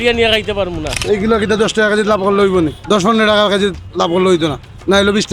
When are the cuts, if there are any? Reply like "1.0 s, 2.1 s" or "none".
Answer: 1.1 s, 2.8 s